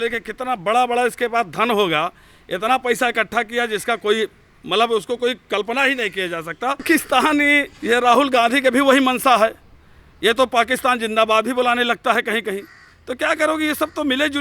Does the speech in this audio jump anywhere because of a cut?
yes; 1 cut; at 6.8 s

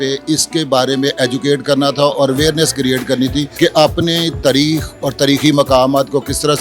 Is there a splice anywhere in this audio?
yes; 1 cut; at 3.5 s

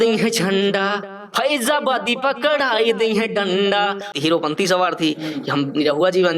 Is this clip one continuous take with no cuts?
no; 1 cut; at 4.1 s

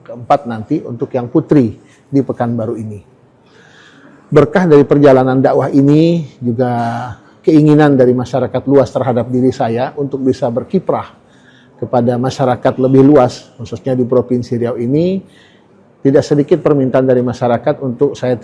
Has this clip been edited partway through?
no; 0 cuts

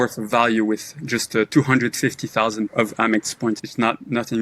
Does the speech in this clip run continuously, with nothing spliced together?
no; 2 cuts; at 2.7 s, 3.6 s

